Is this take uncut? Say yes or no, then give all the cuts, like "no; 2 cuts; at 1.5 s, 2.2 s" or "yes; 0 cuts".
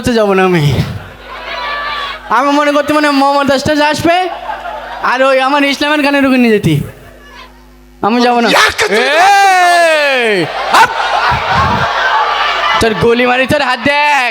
yes; 0 cuts